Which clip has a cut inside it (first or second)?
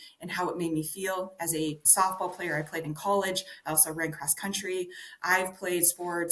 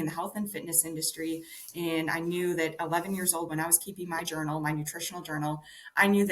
first